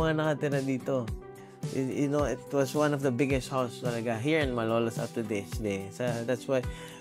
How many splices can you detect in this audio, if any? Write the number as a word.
one